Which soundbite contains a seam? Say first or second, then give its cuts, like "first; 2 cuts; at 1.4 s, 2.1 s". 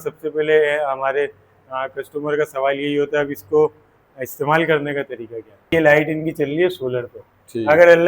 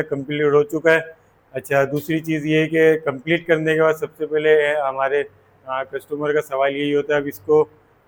first; 1 cut; at 5.7 s